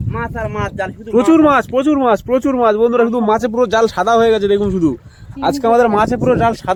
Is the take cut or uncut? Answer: uncut